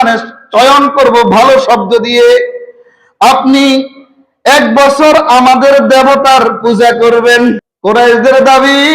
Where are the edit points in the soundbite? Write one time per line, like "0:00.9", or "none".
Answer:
0:07.7